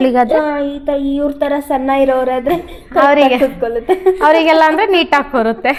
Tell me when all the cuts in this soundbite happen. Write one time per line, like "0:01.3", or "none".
none